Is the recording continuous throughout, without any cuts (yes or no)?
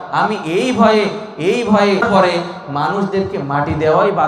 no